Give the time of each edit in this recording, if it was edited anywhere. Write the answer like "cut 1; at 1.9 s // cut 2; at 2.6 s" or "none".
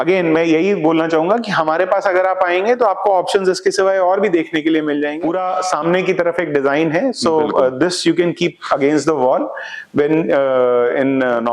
cut 1; at 5.2 s